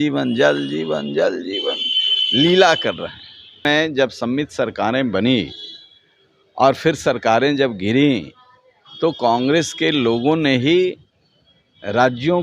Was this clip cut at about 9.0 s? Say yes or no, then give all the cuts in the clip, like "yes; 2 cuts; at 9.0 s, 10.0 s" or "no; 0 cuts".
no; 1 cut; at 3.6 s